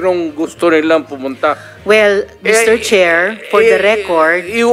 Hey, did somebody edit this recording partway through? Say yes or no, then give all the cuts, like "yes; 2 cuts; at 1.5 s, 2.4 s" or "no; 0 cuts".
no; 0 cuts